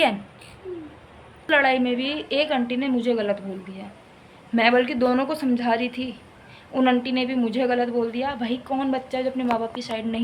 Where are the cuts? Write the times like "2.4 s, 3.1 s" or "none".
1.5 s